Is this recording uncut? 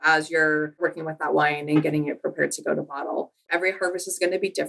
no; 1 cut; at 3.5 s

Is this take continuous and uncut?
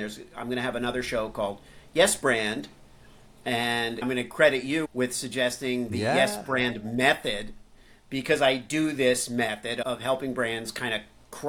no; 2 cuts; at 4.0 s, 9.8 s

